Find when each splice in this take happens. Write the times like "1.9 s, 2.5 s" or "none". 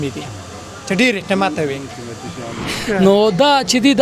2.7 s